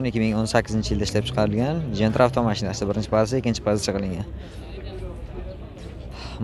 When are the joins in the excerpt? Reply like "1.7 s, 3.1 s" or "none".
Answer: none

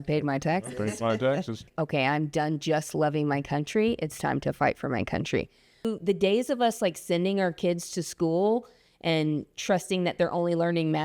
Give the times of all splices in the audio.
1.6 s, 5.8 s

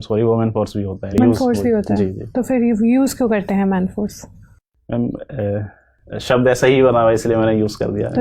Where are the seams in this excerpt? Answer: 1.1 s

